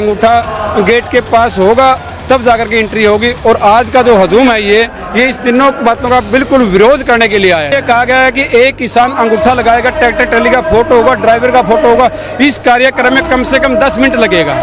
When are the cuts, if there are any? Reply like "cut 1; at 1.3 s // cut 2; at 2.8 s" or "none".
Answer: cut 1; at 7.7 s